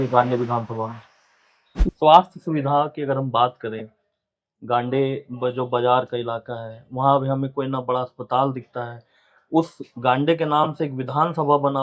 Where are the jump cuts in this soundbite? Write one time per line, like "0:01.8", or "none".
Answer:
0:01.7